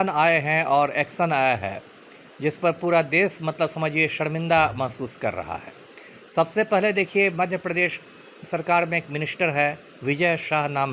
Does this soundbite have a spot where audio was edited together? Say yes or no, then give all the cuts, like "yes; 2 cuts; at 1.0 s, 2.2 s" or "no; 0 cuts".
no; 0 cuts